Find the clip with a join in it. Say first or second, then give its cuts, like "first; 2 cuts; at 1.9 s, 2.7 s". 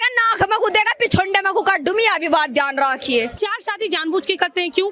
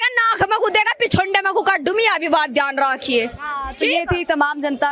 first; 1 cut; at 3.3 s